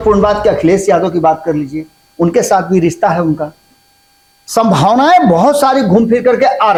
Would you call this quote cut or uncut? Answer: uncut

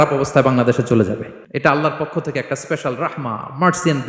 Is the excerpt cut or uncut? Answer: cut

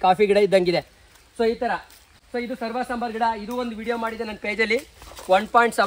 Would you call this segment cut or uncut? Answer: uncut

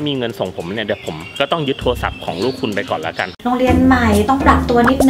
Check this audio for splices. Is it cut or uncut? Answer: cut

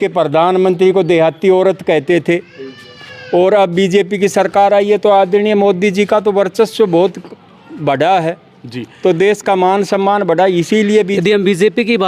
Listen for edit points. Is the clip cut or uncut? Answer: cut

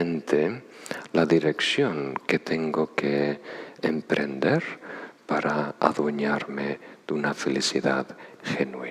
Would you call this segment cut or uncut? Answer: uncut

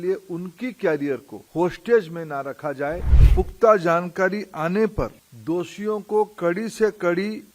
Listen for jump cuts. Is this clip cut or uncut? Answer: cut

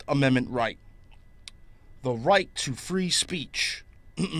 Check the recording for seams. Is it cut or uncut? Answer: cut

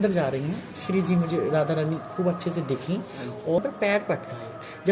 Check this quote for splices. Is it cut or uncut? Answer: cut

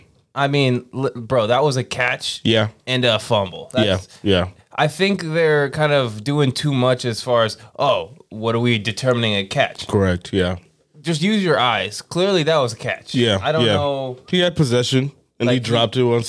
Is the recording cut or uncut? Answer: uncut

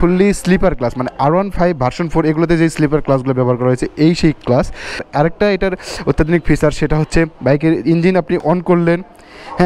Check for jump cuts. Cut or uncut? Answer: cut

